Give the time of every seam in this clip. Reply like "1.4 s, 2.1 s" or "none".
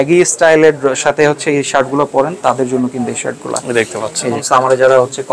4.4 s